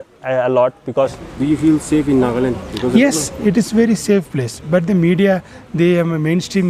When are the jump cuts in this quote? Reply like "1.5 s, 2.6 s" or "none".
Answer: 1.2 s